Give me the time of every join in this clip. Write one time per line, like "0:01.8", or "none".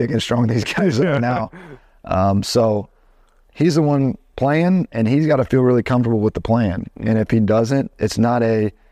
none